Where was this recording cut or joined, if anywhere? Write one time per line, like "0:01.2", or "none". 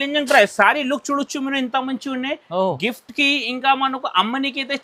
none